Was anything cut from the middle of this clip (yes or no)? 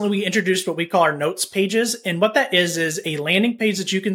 no